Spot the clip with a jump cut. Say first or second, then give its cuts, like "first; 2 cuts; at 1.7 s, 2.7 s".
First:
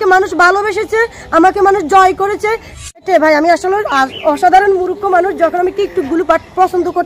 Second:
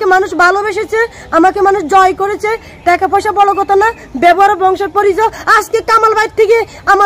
first; 1 cut; at 3.0 s